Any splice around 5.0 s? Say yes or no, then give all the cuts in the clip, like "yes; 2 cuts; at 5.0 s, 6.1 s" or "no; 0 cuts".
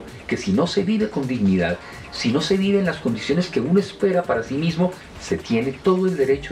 yes; 1 cut; at 5.0 s